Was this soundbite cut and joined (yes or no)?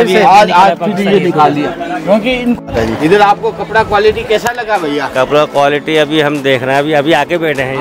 yes